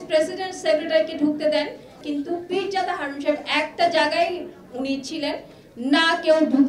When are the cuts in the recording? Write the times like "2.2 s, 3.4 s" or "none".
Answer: 2.0 s